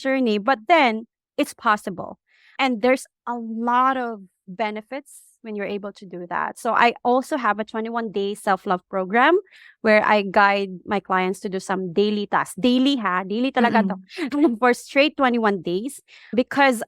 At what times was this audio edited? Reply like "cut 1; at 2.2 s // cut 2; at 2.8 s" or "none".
cut 1; at 1.2 s // cut 2; at 3.1 s // cut 3; at 4.4 s